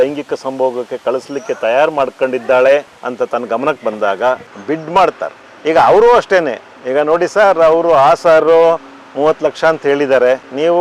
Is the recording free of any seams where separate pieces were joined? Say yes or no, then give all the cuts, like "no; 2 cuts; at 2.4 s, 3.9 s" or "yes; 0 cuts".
no; 1 cut; at 4.5 s